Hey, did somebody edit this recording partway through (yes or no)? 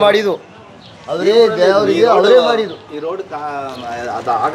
no